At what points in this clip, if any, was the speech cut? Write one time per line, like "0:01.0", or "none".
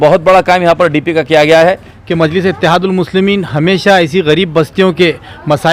0:01.9